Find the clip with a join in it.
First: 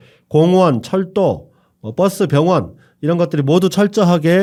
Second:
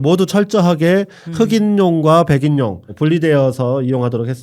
second; 1 cut; at 2.8 s

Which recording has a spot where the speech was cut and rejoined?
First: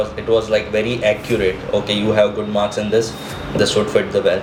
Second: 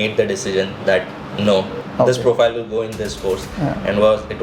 second; 1 cut; at 1.8 s

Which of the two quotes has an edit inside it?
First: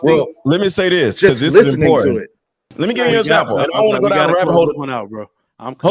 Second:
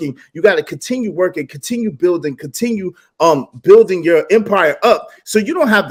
first; 1 cut; at 2.6 s

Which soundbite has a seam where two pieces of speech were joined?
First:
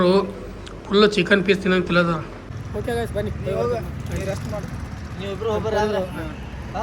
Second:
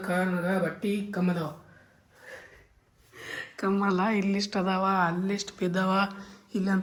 first; 1 cut; at 2.7 s

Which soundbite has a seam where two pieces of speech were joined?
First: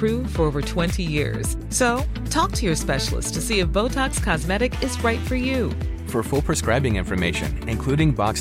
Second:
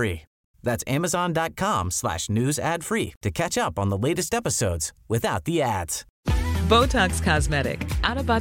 second; 1 cut; at 5.6 s

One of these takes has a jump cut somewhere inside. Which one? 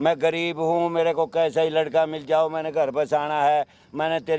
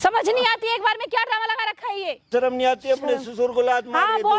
second; 1 cut; at 2.3 s

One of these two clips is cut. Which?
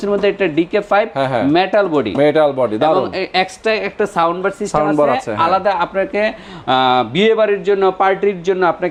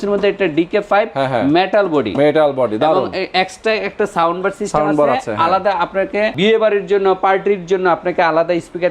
second; 1 cut; at 6.3 s

